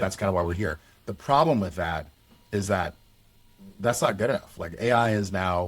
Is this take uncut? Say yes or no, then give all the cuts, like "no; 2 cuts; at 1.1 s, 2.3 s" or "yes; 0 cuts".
yes; 0 cuts